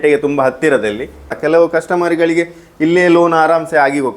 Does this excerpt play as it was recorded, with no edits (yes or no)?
no